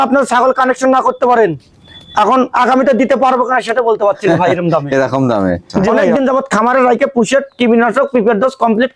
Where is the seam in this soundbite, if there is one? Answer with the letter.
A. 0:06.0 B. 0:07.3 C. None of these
A